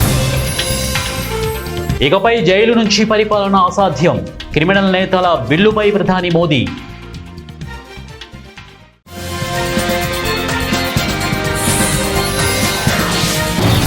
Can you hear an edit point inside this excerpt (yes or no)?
yes